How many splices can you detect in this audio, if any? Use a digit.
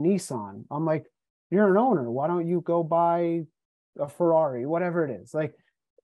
0